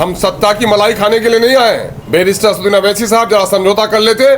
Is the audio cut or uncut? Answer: cut